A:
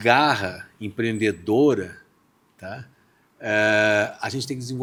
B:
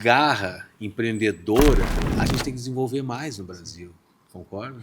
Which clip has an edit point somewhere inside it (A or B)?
B